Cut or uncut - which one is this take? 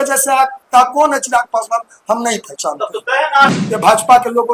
cut